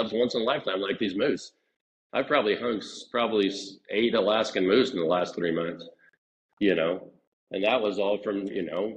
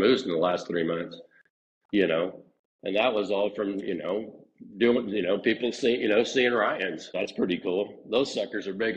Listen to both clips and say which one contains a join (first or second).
second